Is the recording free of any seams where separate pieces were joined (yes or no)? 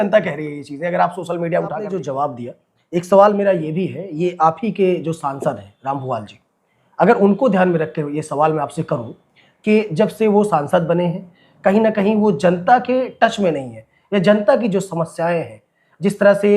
no